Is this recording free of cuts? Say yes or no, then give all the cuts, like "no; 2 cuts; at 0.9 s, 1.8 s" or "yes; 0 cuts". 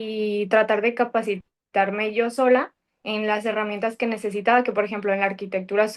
yes; 0 cuts